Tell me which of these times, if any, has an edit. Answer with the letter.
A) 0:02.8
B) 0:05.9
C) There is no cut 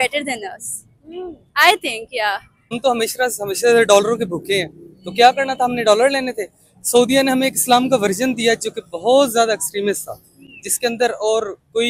A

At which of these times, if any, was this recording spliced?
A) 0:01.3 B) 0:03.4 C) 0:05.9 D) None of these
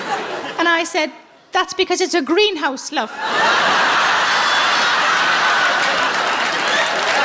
D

